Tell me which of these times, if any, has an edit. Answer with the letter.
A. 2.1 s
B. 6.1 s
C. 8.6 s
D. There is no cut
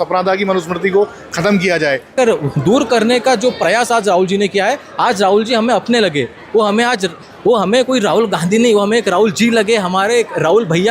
A